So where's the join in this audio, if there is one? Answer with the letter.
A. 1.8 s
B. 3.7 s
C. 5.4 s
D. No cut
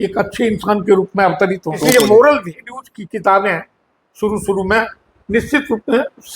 A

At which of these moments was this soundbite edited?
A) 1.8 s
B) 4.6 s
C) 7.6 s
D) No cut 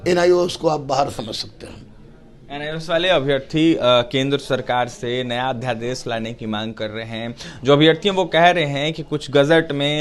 D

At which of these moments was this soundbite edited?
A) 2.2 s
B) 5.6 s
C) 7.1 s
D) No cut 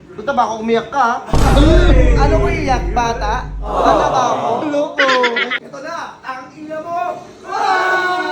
B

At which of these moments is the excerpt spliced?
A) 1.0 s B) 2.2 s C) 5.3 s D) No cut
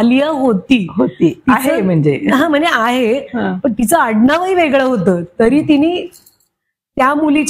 D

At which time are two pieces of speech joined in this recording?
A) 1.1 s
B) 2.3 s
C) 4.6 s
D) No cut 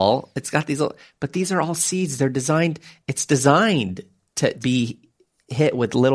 C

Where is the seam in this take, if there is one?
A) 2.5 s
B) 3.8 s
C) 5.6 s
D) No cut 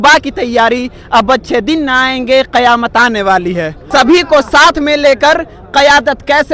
B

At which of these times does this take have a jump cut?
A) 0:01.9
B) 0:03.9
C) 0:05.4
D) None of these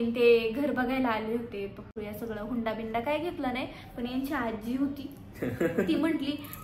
A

